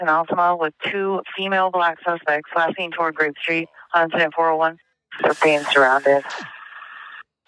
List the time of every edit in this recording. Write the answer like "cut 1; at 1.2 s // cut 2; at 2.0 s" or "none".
cut 1; at 5.2 s